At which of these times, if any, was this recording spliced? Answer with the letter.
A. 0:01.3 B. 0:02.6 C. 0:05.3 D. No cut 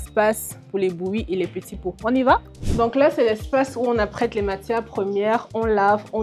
B